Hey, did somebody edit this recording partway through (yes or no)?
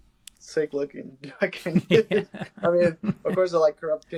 no